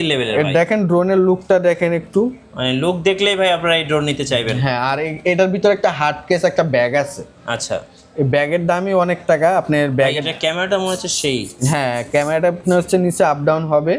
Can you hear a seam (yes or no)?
no